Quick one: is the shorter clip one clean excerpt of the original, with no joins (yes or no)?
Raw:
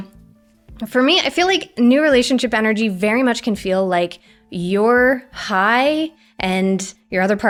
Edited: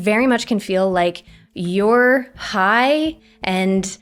yes